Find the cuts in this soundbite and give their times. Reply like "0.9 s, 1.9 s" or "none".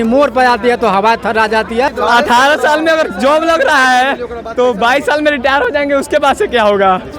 1.9 s

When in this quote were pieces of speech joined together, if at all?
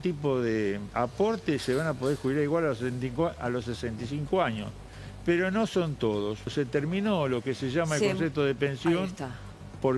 6.5 s

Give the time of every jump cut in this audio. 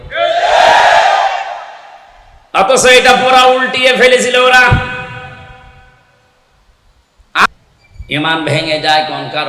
7.5 s

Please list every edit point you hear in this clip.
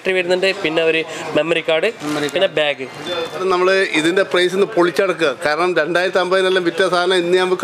3.4 s

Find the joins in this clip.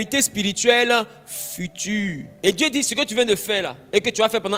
none

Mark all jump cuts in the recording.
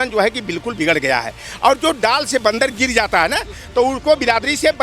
none

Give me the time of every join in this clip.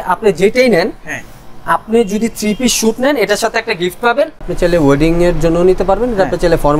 4.5 s

